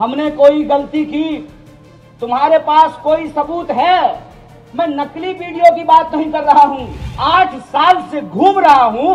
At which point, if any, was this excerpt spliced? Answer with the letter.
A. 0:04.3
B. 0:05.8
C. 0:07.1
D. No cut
C